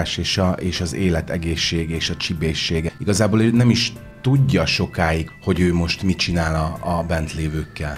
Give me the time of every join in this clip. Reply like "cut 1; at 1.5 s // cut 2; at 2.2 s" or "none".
cut 1; at 2.9 s // cut 2; at 5.3 s